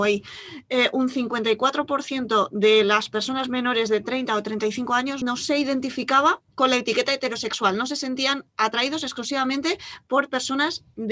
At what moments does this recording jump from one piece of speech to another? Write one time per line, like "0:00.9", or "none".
0:05.1